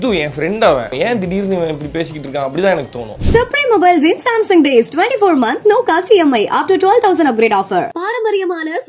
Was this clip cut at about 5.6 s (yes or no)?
no